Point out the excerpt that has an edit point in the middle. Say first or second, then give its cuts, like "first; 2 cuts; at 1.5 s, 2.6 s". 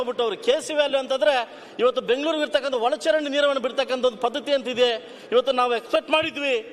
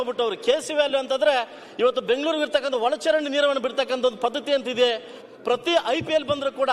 second; 1 cut; at 5.2 s